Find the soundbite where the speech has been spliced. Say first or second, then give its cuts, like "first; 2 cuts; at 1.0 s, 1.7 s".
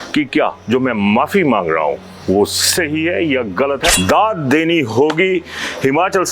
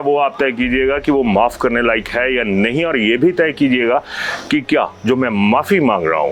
first; 1 cut; at 3.9 s